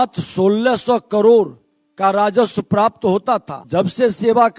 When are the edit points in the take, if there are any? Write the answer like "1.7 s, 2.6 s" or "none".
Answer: 3.6 s